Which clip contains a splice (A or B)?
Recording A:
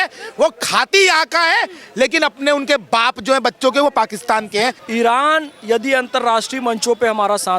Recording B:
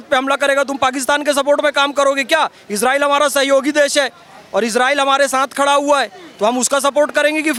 A